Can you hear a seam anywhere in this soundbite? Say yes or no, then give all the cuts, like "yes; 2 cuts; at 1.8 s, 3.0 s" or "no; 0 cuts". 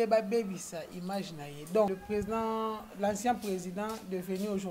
yes; 1 cut; at 1.9 s